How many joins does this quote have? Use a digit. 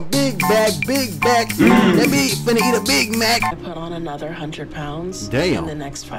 1